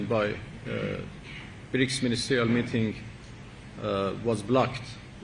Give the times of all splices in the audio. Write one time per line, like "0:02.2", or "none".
none